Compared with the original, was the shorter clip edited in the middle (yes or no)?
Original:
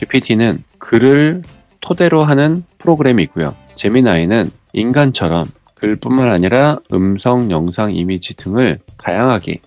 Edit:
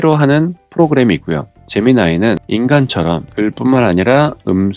yes